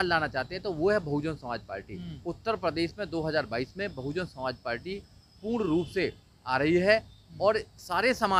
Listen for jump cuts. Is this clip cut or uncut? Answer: uncut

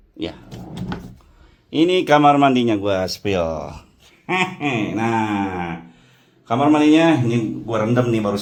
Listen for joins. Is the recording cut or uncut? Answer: uncut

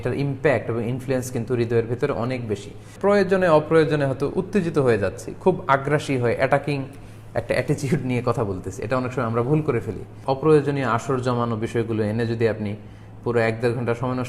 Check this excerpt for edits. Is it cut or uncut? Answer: cut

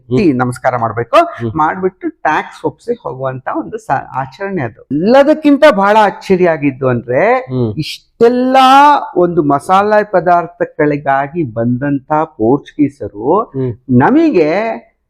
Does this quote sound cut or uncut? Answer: cut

